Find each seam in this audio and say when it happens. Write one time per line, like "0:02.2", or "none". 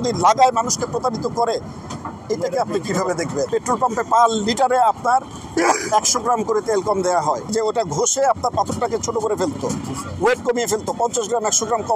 0:03.5
0:07.5

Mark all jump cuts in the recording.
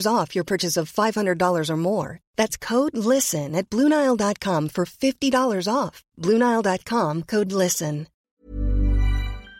0:08.1

